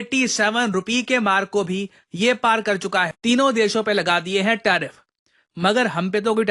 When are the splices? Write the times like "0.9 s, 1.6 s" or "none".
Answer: 3.1 s